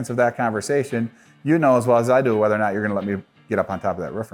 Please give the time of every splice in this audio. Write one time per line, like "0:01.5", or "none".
none